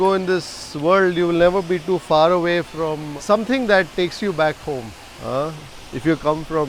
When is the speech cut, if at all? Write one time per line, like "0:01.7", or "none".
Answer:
0:03.1